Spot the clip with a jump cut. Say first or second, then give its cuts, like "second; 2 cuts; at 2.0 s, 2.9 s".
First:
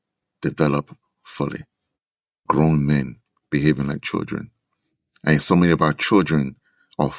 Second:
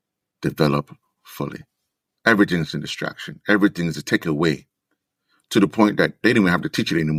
first; 1 cut; at 2.2 s